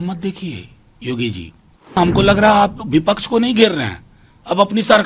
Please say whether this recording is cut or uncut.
cut